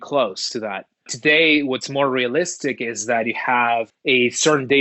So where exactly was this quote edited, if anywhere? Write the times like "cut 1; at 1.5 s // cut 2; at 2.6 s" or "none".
cut 1; at 1.1 s // cut 2; at 3.9 s